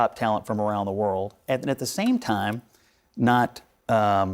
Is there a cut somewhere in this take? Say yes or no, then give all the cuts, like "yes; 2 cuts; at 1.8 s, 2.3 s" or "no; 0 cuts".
no; 0 cuts